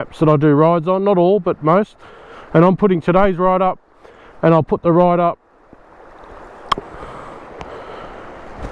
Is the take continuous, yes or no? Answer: yes